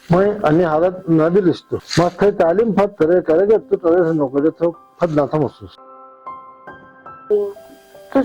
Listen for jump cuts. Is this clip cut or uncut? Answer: cut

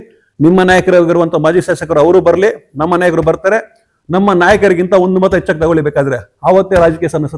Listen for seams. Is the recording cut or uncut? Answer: uncut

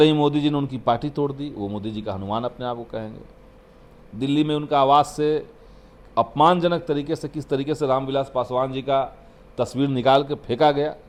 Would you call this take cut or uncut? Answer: uncut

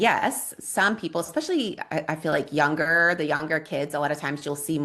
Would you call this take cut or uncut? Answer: uncut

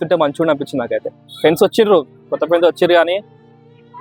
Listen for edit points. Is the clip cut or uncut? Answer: cut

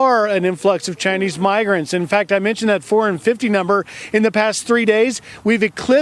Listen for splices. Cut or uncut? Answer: uncut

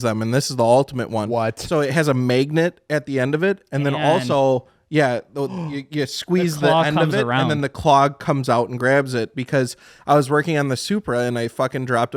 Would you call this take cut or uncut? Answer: uncut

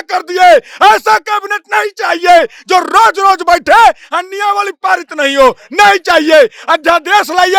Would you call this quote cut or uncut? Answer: uncut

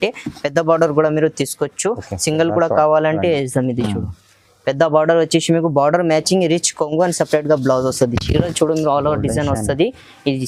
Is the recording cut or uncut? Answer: uncut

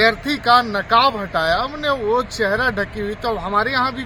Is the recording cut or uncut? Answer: uncut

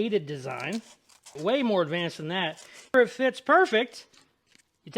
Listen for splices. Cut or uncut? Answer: cut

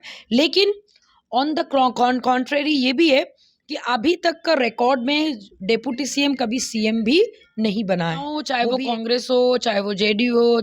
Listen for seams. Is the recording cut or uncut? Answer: cut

